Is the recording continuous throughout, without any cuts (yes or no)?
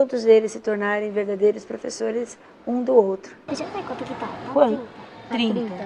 no